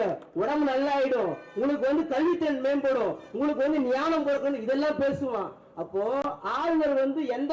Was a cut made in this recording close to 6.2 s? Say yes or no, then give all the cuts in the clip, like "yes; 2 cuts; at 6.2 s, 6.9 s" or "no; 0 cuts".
yes; 1 cut; at 6.2 s